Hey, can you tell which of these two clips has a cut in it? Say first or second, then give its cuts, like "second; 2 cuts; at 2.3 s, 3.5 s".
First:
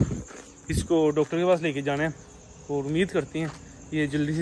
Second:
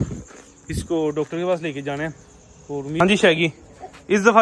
second; 1 cut; at 3.0 s